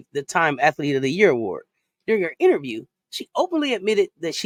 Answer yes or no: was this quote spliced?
no